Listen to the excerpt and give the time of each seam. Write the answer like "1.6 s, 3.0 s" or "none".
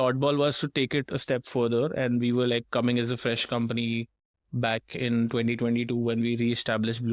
none